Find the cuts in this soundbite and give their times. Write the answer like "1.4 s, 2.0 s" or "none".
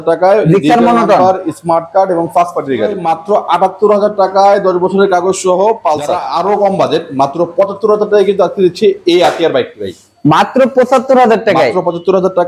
3.0 s, 6.1 s